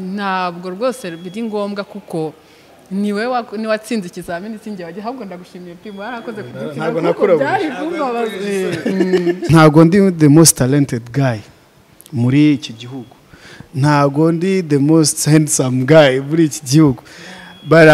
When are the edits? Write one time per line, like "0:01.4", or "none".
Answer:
0:09.5

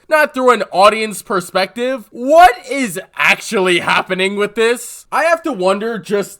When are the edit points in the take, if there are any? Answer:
0:05.0

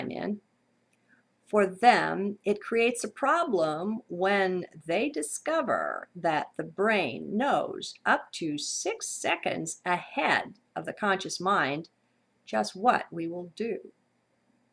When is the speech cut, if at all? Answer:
0:08.7

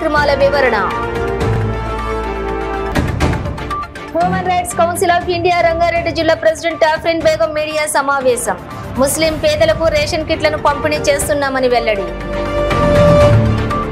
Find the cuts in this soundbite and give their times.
none

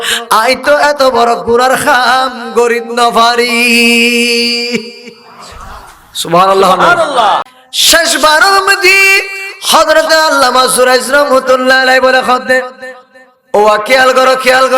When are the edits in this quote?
0:07.4

